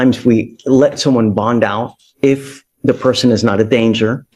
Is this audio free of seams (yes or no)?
yes